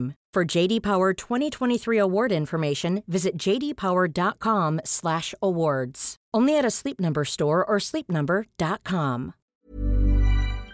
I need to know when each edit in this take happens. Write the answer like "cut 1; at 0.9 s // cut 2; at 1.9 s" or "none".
cut 1; at 9.4 s